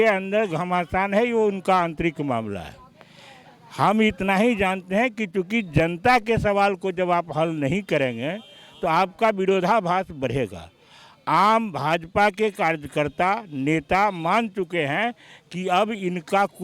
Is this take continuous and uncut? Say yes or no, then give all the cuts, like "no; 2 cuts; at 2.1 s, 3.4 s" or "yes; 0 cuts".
yes; 0 cuts